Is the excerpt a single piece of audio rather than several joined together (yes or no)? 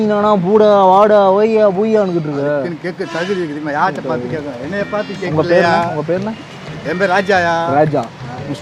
yes